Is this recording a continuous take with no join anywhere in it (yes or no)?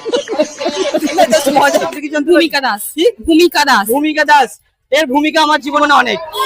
no